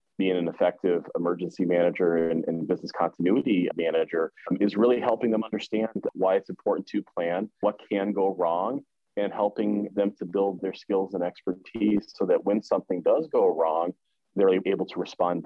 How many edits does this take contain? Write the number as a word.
one